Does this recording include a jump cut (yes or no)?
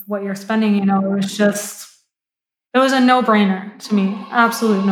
no